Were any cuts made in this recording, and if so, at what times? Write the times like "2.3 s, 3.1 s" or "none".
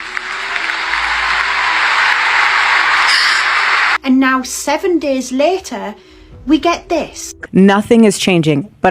3.9 s